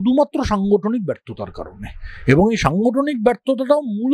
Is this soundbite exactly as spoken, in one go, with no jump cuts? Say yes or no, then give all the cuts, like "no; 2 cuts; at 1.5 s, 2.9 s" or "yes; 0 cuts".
yes; 0 cuts